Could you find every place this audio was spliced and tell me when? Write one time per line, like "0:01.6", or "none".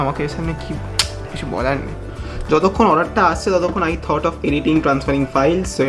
none